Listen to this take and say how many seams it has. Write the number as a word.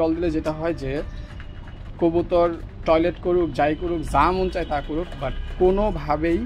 zero